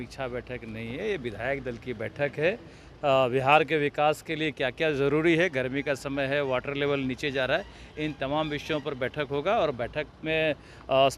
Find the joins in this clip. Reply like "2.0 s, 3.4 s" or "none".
none